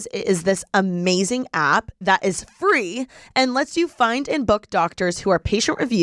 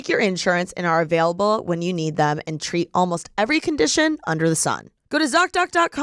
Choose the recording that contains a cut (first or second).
second